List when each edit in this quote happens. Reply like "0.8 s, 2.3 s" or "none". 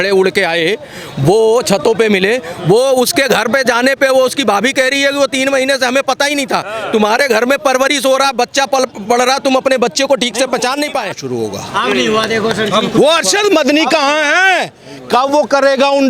11.2 s